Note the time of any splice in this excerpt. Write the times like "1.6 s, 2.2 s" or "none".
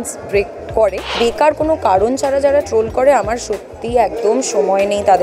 1.1 s